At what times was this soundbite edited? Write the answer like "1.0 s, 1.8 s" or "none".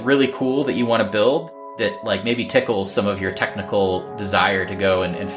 1.6 s